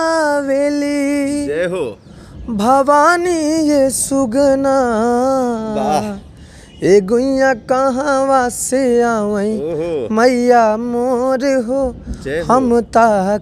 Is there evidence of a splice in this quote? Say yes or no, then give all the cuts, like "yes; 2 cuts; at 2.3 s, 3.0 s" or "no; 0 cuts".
no; 0 cuts